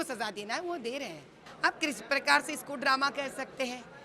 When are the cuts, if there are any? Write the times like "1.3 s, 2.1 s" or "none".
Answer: 1.4 s